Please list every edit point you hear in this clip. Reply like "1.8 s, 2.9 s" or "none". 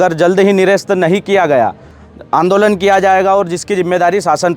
1.9 s